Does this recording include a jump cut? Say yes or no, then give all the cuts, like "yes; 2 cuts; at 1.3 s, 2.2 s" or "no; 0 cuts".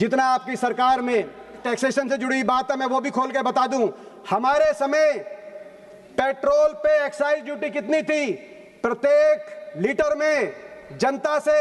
yes; 1 cut; at 1.6 s